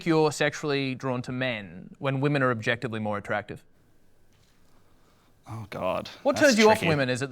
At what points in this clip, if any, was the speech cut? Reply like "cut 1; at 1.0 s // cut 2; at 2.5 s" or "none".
none